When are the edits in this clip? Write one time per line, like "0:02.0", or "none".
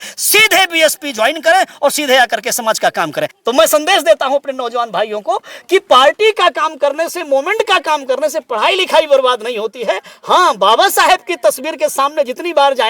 0:03.4